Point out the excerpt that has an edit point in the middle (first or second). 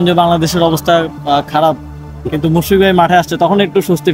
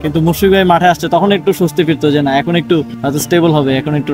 second